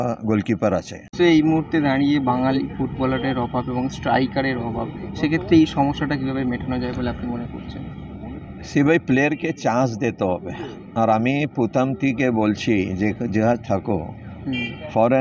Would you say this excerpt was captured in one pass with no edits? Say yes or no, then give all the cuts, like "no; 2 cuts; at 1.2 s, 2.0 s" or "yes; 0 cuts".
no; 1 cut; at 1.1 s